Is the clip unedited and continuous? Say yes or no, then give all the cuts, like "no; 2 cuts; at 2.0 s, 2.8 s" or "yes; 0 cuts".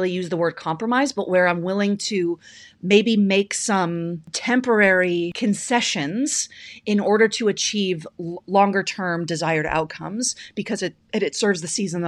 no; 2 cuts; at 4.3 s, 5.3 s